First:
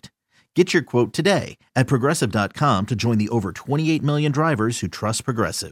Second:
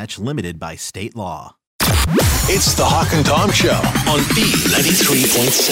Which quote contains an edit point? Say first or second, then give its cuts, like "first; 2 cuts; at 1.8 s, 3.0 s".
second; 1 cut; at 1.7 s